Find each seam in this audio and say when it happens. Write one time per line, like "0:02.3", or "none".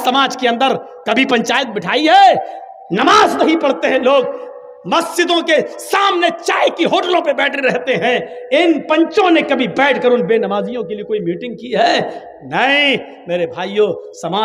none